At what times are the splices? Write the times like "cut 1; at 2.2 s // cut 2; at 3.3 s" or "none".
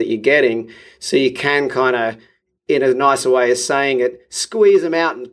none